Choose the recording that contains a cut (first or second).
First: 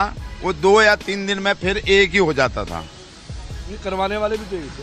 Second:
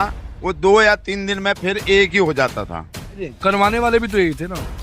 second